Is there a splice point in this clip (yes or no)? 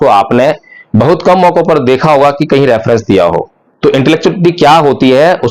yes